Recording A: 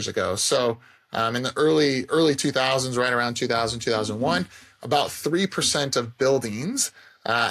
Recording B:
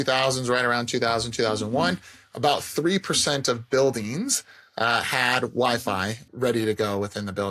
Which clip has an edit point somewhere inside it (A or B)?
B